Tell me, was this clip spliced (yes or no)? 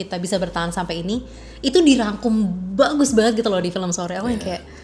no